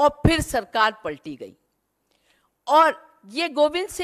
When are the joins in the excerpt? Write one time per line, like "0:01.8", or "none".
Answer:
none